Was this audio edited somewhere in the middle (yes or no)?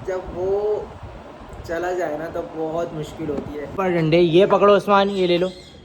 yes